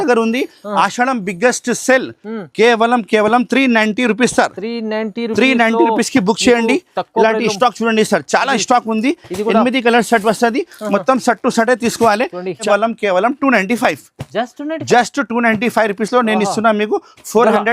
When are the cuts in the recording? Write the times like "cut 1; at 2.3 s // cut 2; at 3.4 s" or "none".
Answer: cut 1; at 12.6 s